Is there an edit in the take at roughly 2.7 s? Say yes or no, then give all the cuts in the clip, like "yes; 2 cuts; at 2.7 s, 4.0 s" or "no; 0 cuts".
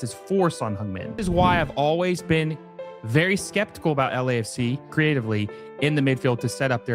no; 2 cuts; at 1.2 s, 4.8 s